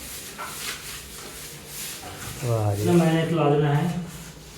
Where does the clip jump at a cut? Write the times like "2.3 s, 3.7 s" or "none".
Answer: 2.9 s